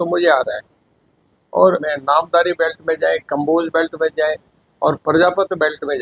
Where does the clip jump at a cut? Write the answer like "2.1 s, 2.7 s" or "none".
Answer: 1.8 s

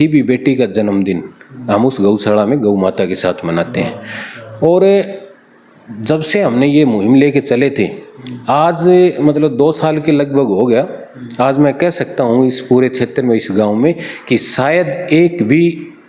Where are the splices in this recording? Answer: none

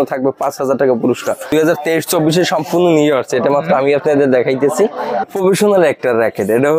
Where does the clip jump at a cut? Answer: 1.5 s, 5.3 s

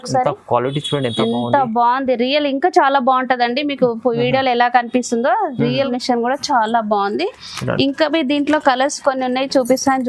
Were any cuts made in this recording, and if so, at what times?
5.9 s

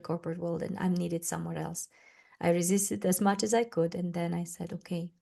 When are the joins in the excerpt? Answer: none

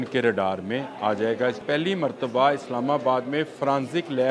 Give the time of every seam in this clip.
1.6 s

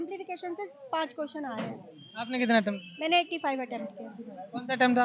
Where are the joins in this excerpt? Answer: none

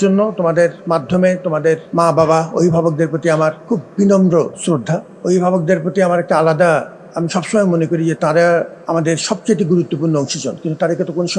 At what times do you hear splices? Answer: 1.8 s, 3.6 s, 5.1 s, 7.0 s, 8.8 s

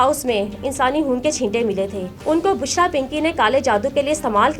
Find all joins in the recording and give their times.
2.1 s

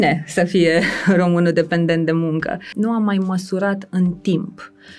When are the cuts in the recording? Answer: 2.7 s

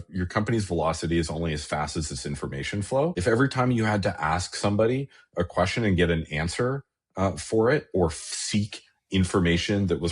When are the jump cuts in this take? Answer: 3.2 s

